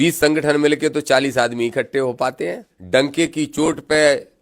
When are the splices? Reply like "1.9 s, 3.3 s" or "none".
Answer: 2.7 s